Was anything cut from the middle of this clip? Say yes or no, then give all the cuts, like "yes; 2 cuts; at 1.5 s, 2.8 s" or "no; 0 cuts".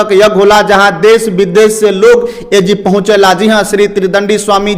no; 0 cuts